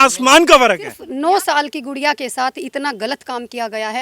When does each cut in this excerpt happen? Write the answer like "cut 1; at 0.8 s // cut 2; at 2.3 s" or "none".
cut 1; at 1.0 s